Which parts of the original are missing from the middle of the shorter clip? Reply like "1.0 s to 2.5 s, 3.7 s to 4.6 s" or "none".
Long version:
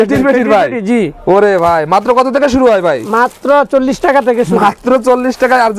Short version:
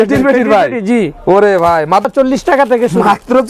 2.1 s to 3.6 s